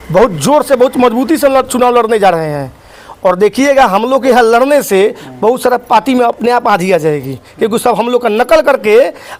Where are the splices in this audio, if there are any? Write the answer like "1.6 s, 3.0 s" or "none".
none

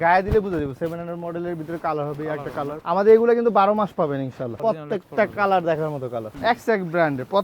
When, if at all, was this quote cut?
2.8 s, 4.5 s, 6.2 s

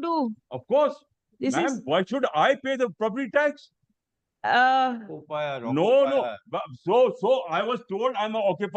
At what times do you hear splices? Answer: none

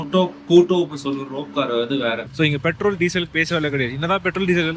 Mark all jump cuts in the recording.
2.3 s

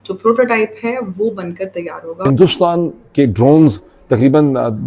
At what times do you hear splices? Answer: 2.2 s

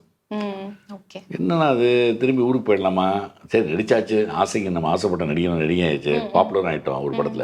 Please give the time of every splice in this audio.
none

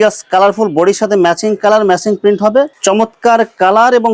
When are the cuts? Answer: 2.7 s

